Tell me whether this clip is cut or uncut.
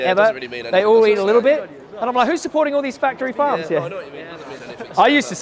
uncut